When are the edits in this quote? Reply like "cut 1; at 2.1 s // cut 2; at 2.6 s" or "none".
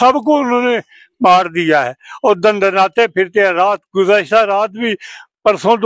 none